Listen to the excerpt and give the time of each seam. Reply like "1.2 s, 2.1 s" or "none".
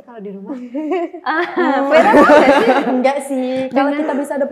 none